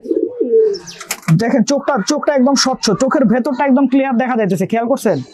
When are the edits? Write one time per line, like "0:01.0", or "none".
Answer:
none